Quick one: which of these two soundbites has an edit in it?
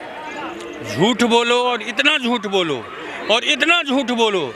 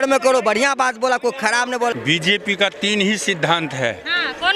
second; 1 cut; at 1.9 s

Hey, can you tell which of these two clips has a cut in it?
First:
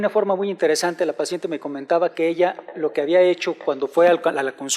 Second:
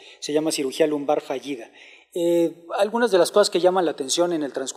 first; 1 cut; at 3.4 s

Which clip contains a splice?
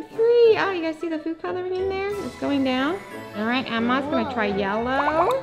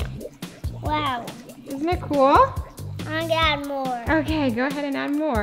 first; 1 cut; at 3.4 s

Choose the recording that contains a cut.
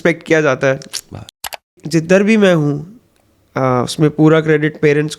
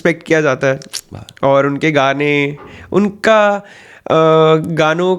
first; 1 cut; at 1.4 s

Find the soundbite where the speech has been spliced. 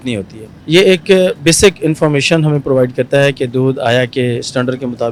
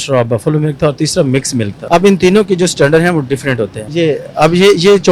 second; 2 cuts; at 1.8 s, 3.8 s

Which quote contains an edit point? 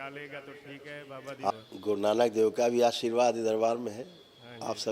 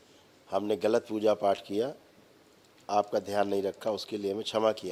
first; 1 cut; at 1.5 s

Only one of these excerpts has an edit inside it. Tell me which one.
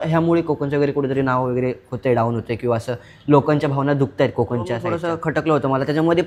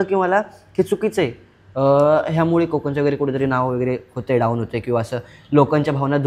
first; 1 cut; at 4.9 s

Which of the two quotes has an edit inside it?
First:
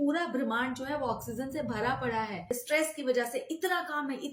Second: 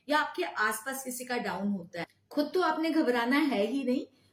first; 1 cut; at 2.5 s

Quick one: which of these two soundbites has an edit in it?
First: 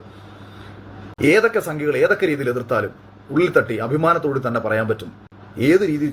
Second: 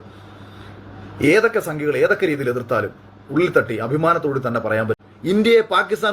second; 1 cut; at 5.1 s

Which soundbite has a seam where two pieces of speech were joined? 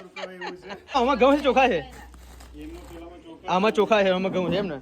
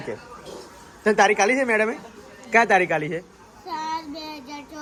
first; 1 cut; at 1.0 s

